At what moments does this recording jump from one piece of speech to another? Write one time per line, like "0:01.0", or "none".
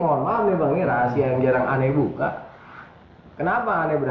none